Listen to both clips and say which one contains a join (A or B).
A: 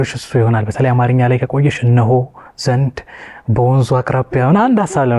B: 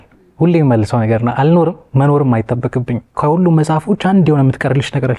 B